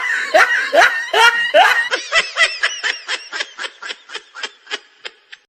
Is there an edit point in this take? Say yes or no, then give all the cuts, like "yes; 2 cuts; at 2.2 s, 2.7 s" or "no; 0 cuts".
yes; 1 cut; at 1.8 s